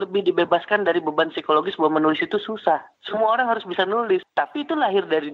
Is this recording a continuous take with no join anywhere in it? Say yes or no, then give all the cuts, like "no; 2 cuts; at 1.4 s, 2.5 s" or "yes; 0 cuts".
no; 1 cut; at 4.3 s